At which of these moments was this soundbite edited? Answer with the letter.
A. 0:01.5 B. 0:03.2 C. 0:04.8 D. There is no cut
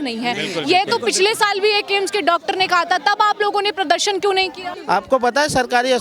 C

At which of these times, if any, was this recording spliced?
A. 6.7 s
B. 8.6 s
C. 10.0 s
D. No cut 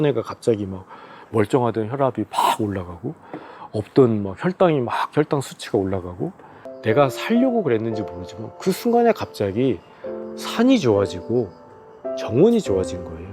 A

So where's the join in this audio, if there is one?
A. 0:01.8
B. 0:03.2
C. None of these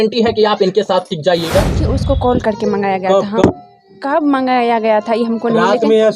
A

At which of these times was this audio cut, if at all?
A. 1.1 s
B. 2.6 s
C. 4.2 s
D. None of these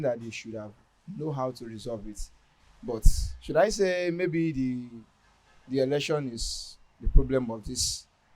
D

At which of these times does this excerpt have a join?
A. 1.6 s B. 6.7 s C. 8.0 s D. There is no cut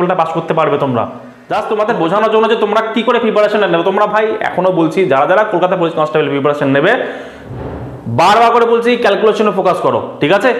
A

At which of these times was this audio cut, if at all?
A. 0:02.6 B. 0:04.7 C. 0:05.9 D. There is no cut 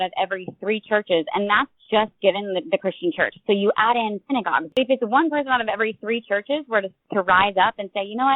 B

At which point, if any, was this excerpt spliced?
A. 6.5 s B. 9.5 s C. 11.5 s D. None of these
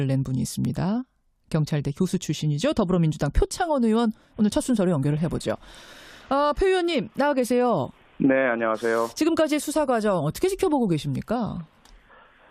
B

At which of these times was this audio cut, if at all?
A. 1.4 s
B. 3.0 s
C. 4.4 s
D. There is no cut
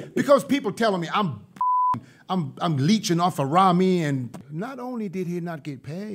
C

